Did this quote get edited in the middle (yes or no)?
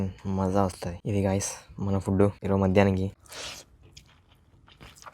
yes